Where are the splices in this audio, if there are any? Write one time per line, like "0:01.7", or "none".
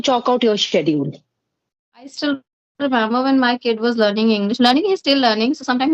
0:02.2

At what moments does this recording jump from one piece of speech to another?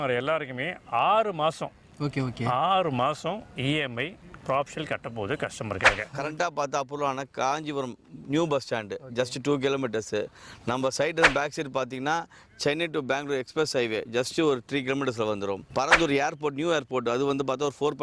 0:06.0

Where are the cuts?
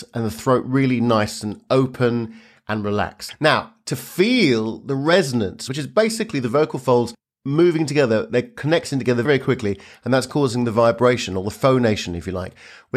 0:03.2
0:05.6

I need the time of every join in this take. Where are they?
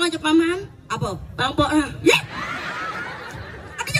none

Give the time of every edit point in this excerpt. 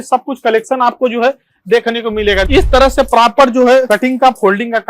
0:02.5
0:03.9

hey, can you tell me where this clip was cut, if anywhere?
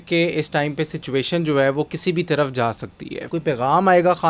0:03.3

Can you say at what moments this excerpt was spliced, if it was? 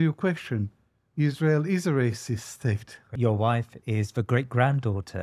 0:03.1

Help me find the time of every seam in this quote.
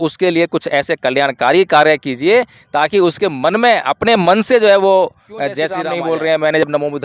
0:05.8

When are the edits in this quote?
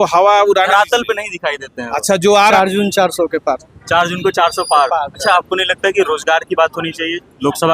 0:02.5
0:05.2

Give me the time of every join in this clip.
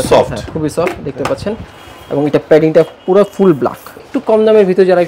0:04.0

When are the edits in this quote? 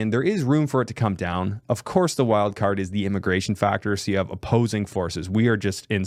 none

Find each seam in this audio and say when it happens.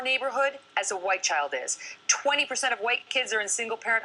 0:01.8

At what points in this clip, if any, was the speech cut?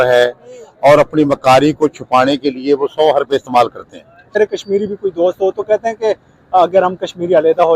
0:04.3

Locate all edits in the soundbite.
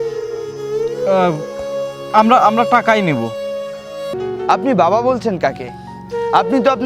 0:04.1

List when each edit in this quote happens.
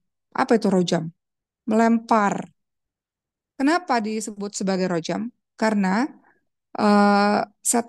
none

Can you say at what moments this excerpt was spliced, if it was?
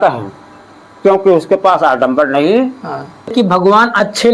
0:03.3

